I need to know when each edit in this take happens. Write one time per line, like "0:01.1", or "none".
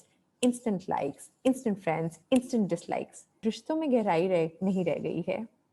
0:03.4